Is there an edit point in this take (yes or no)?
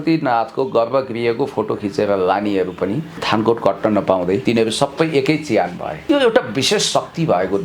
yes